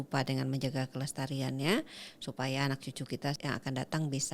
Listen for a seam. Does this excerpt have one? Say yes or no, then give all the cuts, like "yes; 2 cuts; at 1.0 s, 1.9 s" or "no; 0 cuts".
yes; 1 cut; at 3.4 s